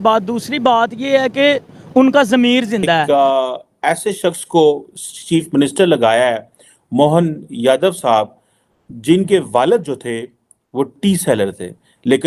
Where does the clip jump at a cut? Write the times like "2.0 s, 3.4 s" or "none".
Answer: 2.7 s

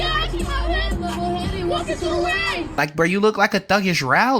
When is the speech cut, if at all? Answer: 2.7 s

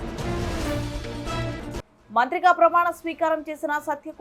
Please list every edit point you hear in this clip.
1.7 s

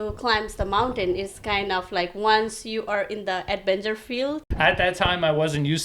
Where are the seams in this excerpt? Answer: 4.4 s

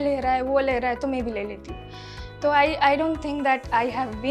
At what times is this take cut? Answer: none

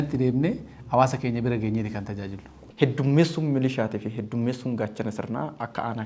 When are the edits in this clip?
2.6 s

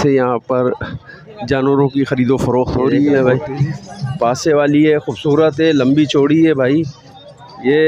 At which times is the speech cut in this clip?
3.1 s

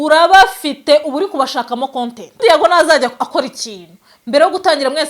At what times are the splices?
2.4 s

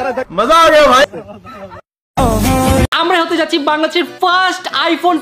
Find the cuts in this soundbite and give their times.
1.0 s, 2.8 s

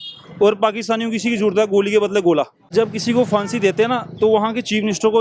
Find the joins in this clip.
2.6 s

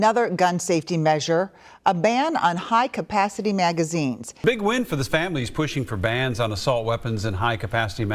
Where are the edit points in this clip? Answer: none

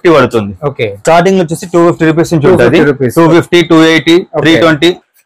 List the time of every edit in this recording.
1.0 s

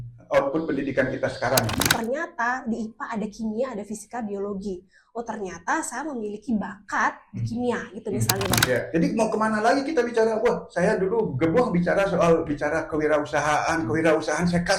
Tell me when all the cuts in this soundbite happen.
1.9 s, 8.6 s

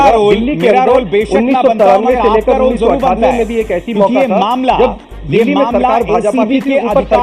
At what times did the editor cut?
none

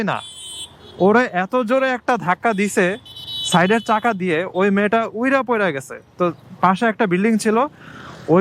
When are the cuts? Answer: none

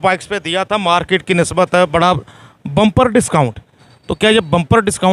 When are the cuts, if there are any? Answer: none

